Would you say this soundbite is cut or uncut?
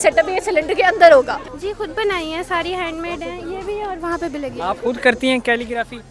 cut